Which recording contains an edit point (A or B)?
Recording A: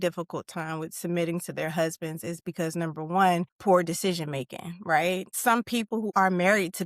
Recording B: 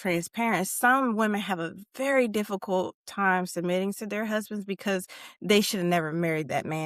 A